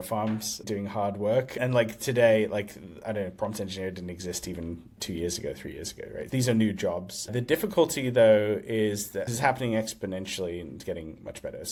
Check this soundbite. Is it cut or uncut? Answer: uncut